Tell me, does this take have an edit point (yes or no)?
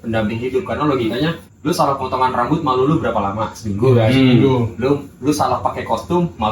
yes